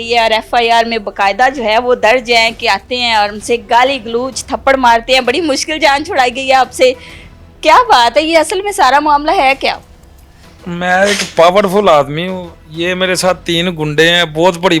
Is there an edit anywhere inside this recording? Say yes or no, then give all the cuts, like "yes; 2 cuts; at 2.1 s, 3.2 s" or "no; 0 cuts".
no; 0 cuts